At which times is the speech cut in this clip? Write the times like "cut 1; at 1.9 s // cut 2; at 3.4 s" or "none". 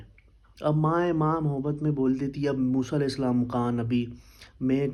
none